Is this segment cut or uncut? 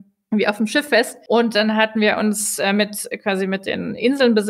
cut